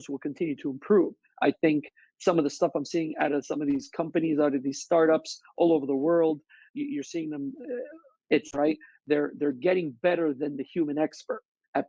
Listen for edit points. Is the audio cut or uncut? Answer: uncut